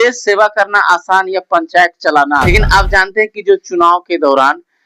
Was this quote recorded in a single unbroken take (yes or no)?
no